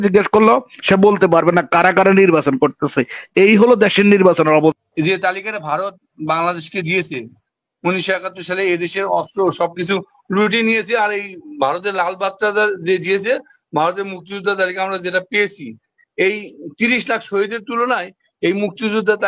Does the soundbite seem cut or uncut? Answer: cut